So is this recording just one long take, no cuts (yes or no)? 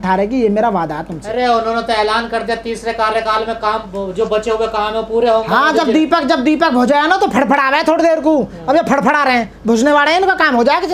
yes